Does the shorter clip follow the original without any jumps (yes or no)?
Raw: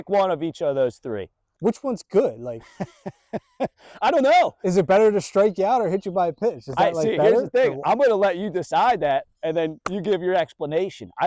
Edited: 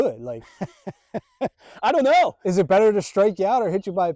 yes